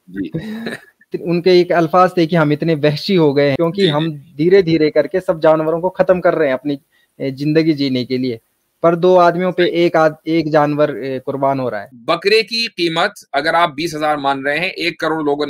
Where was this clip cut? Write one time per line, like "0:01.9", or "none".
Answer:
0:01.2
0:03.5
0:11.9